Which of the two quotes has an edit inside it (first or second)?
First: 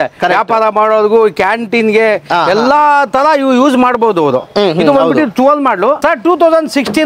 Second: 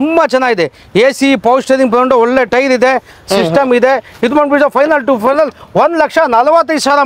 first